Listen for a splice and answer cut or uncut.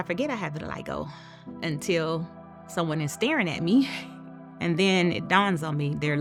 uncut